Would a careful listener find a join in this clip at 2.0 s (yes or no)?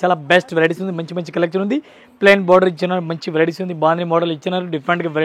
no